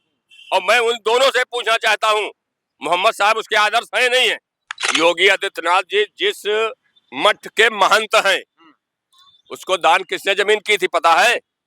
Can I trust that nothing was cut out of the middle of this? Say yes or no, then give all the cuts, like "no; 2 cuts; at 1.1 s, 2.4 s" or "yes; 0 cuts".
no; 1 cut; at 4.9 s